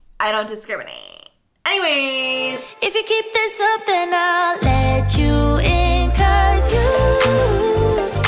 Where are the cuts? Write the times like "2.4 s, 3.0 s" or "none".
2.6 s